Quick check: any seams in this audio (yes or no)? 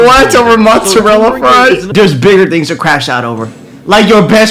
yes